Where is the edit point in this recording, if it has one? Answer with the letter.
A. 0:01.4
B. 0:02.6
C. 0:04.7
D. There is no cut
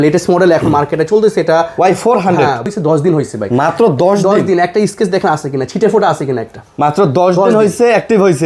B